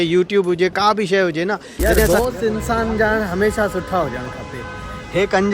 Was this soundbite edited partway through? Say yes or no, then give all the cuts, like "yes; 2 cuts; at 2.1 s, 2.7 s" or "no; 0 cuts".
yes; 1 cut; at 2.1 s